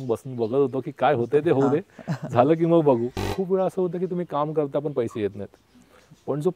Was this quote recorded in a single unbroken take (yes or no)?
no